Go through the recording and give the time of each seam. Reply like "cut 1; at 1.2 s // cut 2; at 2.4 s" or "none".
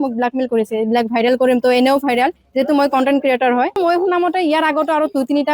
cut 1; at 3.8 s